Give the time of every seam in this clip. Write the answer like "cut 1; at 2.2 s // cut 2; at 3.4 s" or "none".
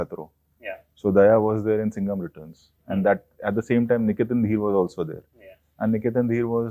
none